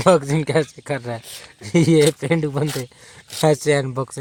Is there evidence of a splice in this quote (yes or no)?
no